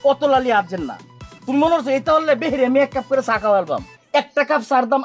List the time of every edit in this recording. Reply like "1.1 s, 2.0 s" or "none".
3.9 s